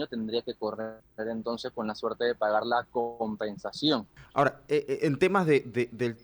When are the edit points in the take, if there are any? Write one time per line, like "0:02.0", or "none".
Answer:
0:01.0
0:04.2